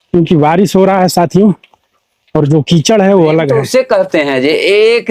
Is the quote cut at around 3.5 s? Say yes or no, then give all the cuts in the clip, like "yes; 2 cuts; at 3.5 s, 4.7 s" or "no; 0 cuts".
yes; 1 cut; at 3.5 s